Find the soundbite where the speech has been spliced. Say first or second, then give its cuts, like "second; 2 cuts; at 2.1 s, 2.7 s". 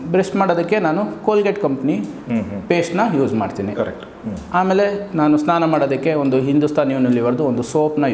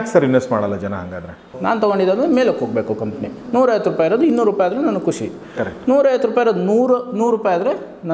second; 1 cut; at 1.5 s